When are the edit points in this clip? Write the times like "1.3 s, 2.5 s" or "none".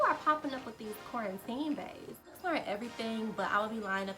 2.4 s